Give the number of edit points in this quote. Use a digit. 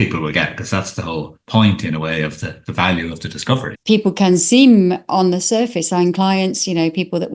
1